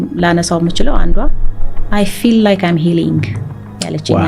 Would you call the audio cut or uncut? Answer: uncut